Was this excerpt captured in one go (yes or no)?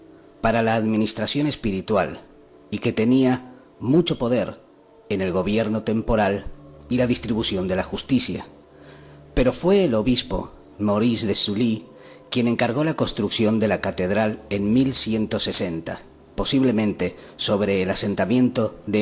no